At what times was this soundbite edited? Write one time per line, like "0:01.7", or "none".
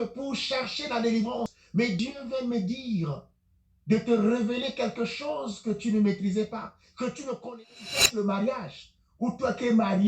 0:01.9
0:07.7